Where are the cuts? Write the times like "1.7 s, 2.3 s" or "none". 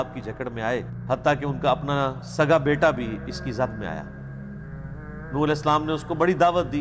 1.0 s